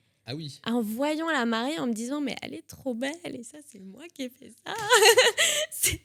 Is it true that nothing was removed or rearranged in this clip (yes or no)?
yes